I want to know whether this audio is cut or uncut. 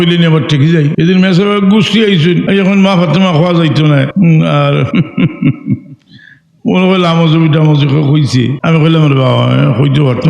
cut